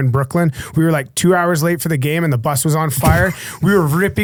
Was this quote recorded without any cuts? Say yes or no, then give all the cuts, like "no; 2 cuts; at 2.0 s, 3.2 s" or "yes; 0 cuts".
yes; 0 cuts